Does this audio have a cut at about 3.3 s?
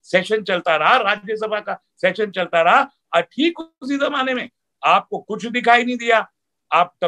no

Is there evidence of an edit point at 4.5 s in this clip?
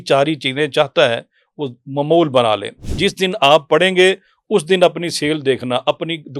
no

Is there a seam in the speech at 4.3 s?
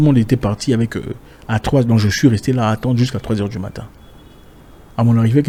no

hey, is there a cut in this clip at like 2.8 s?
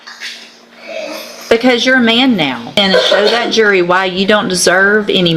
yes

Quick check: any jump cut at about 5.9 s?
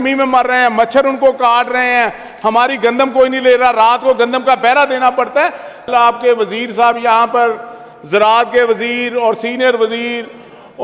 yes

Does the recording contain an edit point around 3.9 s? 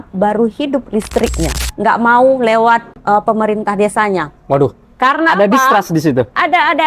no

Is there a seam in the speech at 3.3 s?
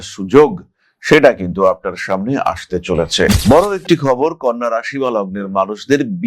yes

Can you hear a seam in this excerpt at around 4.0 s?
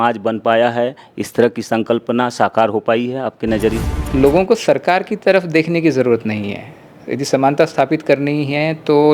yes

